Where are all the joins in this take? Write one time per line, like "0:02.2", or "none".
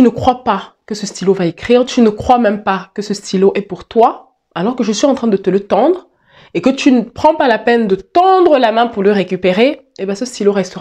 none